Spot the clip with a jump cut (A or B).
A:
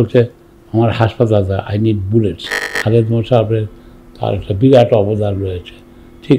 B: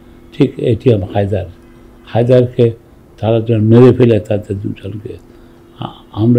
A